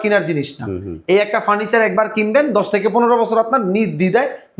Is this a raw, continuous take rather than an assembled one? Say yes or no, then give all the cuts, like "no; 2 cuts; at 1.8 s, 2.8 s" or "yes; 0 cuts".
yes; 0 cuts